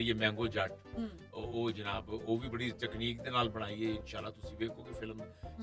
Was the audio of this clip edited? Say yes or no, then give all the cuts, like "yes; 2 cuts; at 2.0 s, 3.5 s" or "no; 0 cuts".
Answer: no; 0 cuts